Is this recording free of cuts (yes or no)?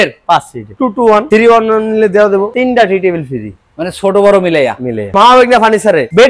no